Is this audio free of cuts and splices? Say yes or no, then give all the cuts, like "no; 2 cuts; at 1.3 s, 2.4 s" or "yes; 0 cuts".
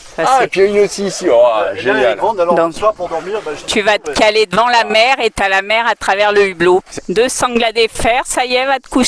no; 1 cut; at 7.0 s